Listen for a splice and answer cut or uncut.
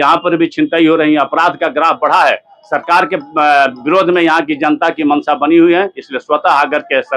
uncut